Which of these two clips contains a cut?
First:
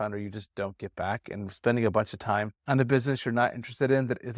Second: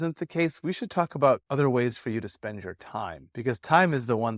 second; 1 cut; at 1.5 s

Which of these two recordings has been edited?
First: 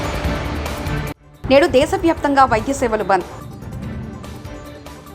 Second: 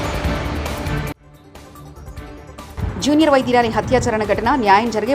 second; 1 cut; at 1.3 s

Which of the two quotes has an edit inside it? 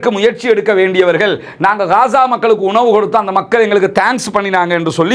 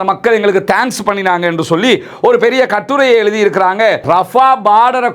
second; 1 cut; at 4.0 s

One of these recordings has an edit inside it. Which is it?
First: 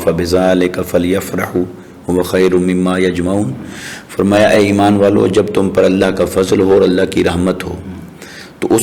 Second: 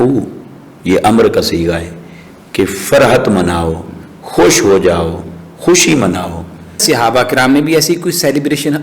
second; 1 cut; at 6.8 s

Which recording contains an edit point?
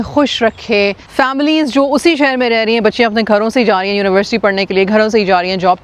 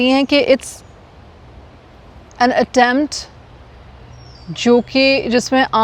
first; 1 cut; at 1.0 s

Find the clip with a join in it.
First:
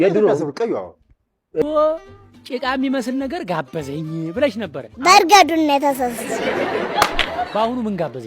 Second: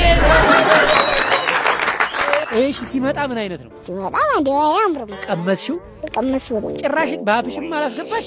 first; 1 cut; at 1.6 s

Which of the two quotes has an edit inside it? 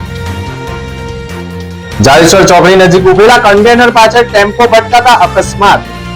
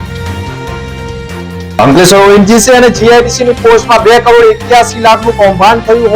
first; 1 cut; at 1.6 s

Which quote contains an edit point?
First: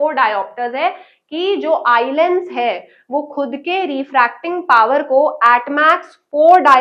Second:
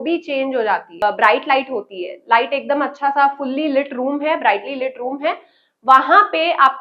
second; 1 cut; at 1.0 s

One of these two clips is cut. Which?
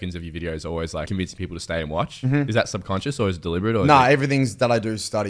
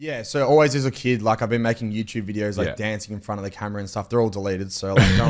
first; 2 cuts; at 1.1 s, 2.5 s

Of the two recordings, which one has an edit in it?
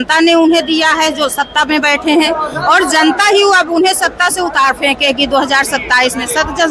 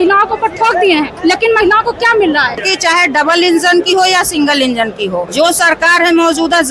second; 3 cuts; at 1.1 s, 2.7 s, 5.3 s

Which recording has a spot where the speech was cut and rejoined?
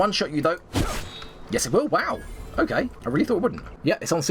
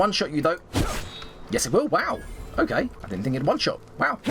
second; 1 cut; at 3.0 s

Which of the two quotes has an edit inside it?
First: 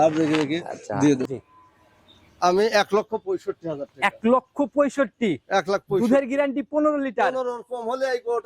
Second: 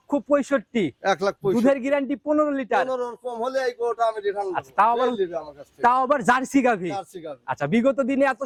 first; 1 cut; at 1.3 s

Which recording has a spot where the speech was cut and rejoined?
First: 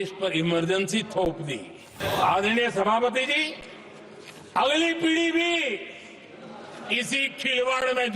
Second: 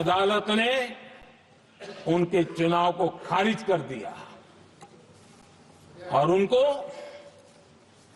first; 1 cut; at 2.0 s

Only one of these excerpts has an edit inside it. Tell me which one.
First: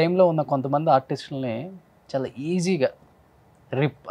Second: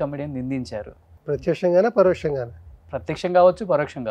second; 1 cut; at 1.1 s

